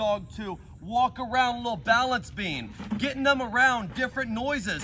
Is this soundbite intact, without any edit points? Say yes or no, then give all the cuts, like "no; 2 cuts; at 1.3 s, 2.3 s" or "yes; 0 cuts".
yes; 0 cuts